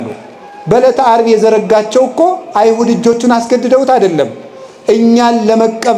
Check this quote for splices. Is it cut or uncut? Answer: uncut